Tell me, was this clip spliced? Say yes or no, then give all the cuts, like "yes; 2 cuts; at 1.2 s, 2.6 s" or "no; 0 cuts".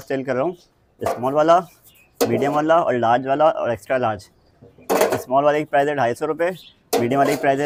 no; 0 cuts